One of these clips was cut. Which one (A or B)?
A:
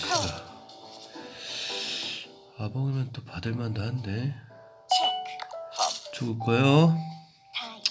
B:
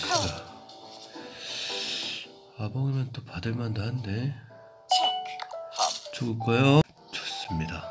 B